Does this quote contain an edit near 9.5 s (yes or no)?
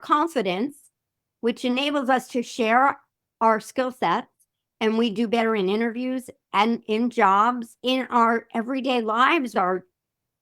yes